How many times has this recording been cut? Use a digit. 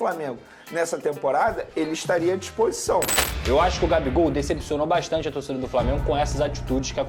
1